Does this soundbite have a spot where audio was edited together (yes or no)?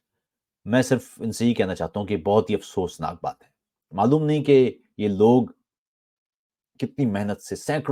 no